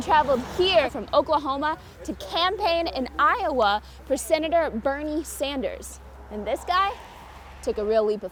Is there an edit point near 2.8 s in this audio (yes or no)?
no